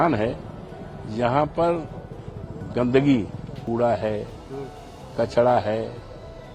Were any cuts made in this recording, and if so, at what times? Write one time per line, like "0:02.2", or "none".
0:03.6